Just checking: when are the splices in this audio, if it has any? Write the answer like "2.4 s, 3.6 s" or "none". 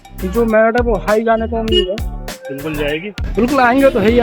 3.2 s